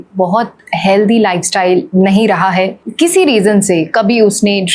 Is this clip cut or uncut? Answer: cut